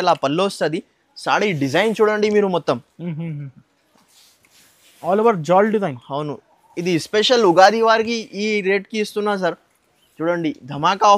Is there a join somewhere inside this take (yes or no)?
no